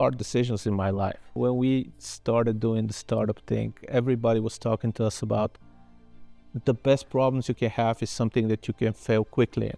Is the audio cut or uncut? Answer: cut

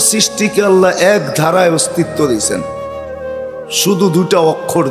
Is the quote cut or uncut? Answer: cut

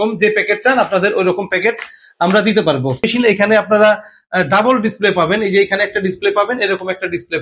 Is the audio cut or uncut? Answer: cut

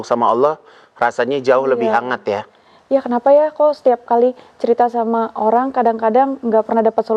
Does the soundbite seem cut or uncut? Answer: uncut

